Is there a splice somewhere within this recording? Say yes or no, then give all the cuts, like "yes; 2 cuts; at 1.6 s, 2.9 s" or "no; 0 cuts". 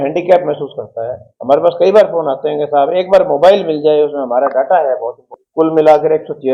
yes; 1 cut; at 5.4 s